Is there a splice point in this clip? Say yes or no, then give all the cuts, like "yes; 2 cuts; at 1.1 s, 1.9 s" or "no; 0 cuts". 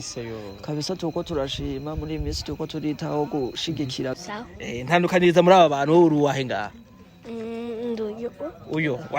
yes; 1 cut; at 4.1 s